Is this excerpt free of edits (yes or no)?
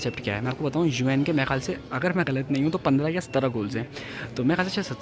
yes